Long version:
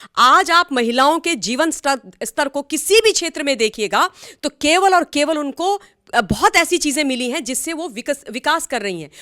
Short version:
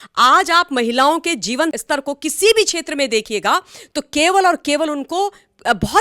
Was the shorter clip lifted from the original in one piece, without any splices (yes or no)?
no